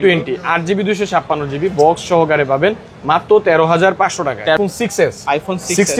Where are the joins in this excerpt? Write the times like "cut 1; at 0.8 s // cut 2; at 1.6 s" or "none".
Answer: cut 1; at 4.6 s